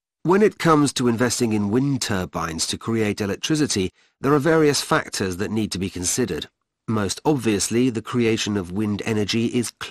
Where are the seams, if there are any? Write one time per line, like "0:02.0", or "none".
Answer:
none